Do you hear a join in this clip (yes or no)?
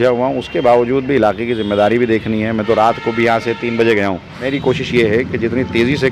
yes